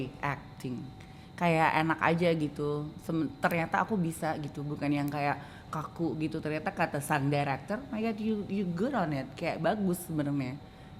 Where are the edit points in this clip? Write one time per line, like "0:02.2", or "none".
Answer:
none